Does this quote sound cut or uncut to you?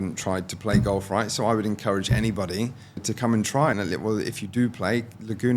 cut